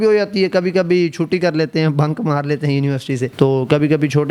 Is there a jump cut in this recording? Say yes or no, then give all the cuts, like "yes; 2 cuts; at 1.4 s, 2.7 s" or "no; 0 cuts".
no; 0 cuts